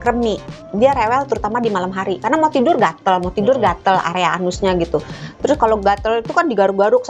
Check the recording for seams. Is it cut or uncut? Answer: uncut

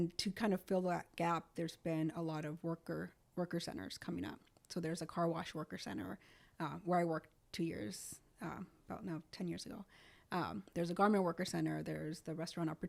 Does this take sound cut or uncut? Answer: uncut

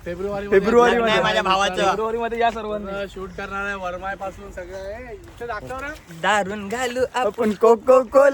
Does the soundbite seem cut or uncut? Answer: uncut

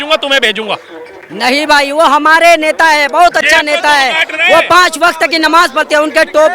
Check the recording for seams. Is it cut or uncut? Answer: uncut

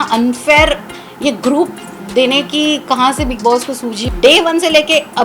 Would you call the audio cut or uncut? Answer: cut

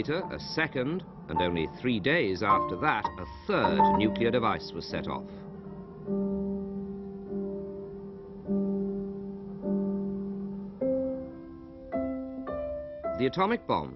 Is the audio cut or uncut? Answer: uncut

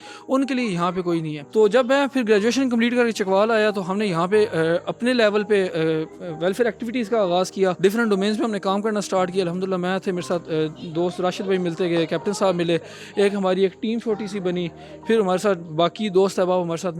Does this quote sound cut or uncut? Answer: cut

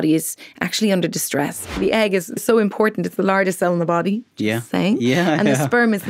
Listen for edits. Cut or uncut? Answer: cut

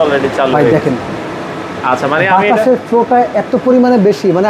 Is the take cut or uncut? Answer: uncut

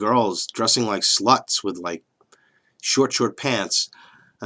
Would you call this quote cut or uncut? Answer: cut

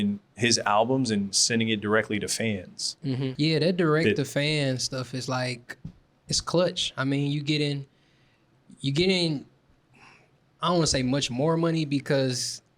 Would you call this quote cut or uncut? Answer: cut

